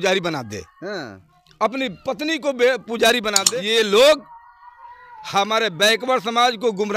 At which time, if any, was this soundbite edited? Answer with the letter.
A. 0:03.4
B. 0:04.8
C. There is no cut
A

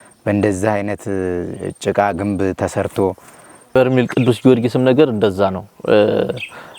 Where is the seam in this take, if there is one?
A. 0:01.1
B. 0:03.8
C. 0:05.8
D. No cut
B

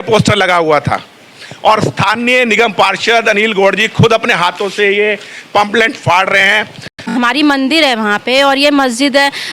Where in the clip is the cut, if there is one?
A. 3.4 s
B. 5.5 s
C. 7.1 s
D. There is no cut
C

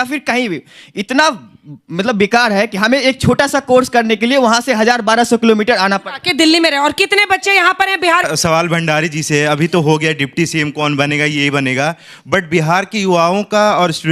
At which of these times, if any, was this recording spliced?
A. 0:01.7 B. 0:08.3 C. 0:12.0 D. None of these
B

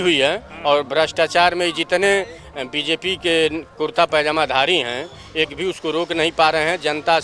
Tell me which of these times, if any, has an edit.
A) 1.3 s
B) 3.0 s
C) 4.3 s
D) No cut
D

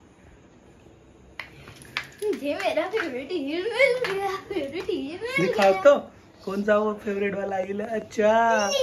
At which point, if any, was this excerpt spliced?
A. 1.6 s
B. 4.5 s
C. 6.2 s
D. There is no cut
D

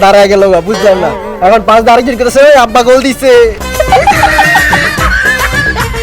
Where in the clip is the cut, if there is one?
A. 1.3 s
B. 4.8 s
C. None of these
A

